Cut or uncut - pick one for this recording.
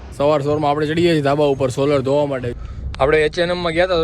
cut